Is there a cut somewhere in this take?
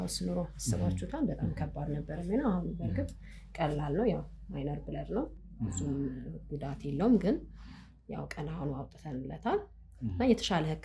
no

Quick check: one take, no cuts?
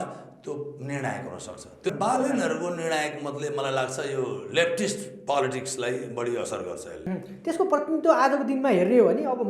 no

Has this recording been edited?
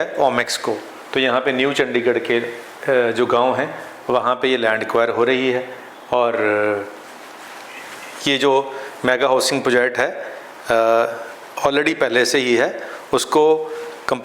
no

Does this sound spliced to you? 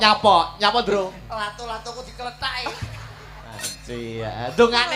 yes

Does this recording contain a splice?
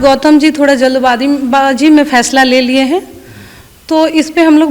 no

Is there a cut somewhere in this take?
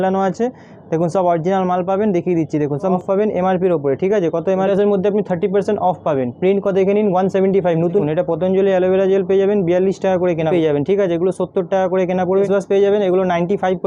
yes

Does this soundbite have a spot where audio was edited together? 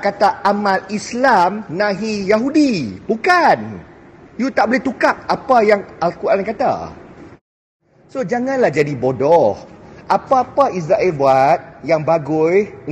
yes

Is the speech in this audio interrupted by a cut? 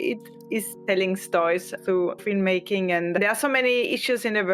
yes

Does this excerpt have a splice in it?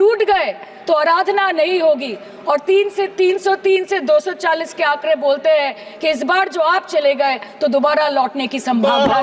no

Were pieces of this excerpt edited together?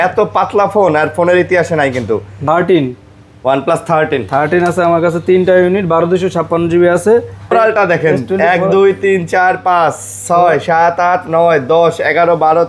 yes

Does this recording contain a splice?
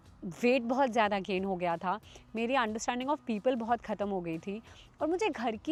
no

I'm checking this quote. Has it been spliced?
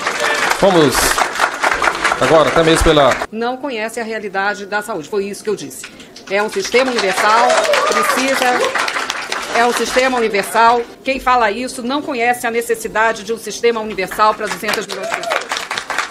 yes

